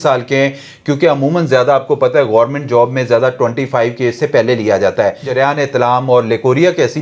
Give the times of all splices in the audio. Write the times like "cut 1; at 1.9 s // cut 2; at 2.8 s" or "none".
cut 1; at 5.3 s